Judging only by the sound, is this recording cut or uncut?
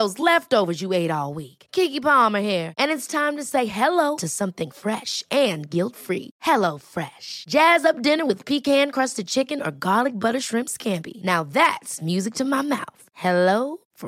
uncut